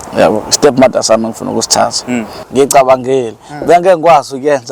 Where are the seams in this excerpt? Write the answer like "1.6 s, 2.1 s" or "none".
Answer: 2.3 s